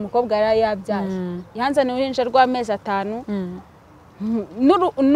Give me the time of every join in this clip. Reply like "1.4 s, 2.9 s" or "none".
none